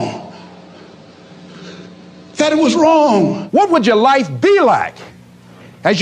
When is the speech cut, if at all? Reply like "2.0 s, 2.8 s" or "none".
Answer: 3.4 s